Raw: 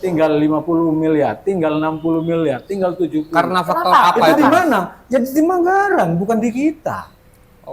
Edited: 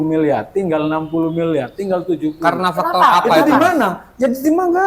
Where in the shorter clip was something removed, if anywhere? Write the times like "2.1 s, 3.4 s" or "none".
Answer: none